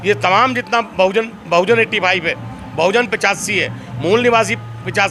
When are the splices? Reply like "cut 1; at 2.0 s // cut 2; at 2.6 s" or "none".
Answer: none